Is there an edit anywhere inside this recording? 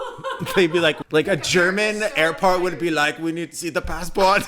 yes; 1 cut; at 1.0 s

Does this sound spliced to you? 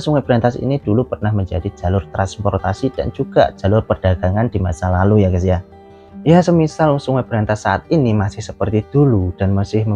no; 0 cuts

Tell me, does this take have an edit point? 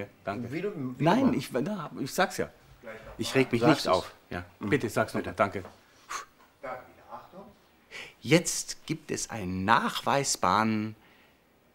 no; 0 cuts

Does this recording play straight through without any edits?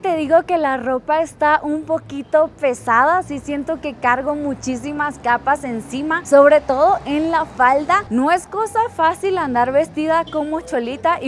yes; 0 cuts

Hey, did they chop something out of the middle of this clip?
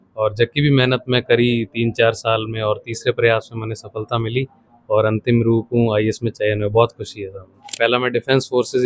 yes; 1 cut; at 7.7 s

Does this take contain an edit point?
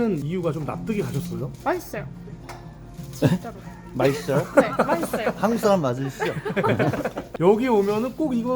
yes; 1 cut; at 7.2 s

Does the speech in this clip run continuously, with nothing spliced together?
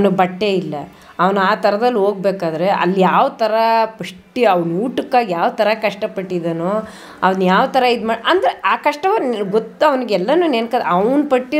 yes; 0 cuts

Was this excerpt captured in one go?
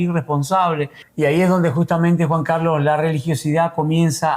no; 1 cut; at 1.0 s

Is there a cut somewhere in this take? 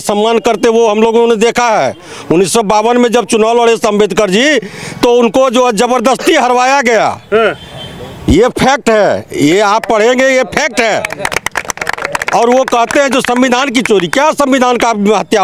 no; 0 cuts

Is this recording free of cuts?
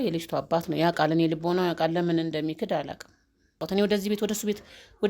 no; 1 cut; at 3.6 s

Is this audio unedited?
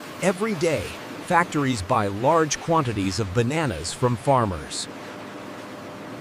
yes; 0 cuts

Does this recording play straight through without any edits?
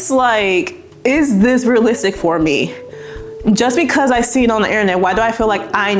yes; 0 cuts

